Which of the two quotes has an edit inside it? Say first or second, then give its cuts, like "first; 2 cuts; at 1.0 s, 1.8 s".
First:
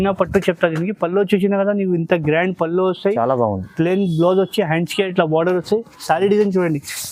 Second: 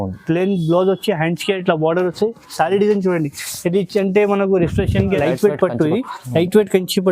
second; 1 cut; at 5.2 s